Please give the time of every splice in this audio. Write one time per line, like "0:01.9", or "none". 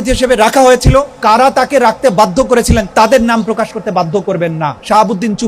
0:01.1
0:02.9
0:04.2

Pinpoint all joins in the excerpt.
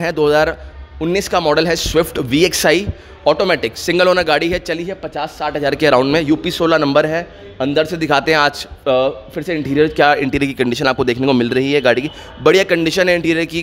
none

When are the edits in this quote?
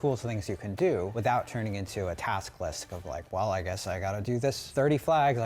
0:01.1
0:04.6

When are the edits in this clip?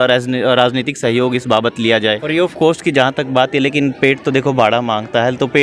0:02.2

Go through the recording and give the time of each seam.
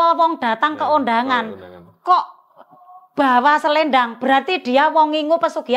none

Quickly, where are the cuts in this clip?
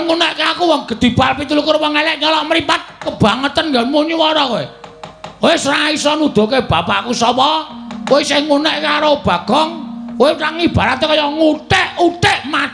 0:03.1

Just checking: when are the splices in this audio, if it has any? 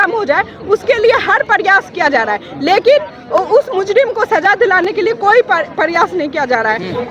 none

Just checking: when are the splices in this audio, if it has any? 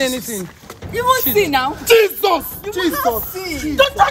none

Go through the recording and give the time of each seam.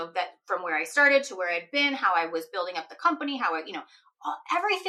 none

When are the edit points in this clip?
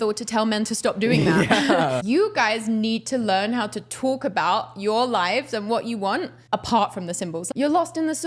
0:02.0
0:06.4
0:07.4

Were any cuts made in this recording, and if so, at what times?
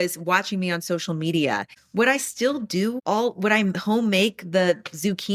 0:03.0

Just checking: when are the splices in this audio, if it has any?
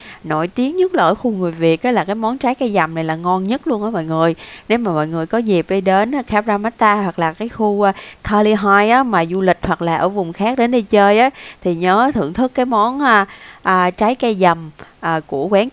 none

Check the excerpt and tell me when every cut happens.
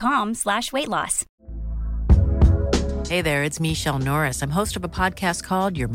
0:01.2

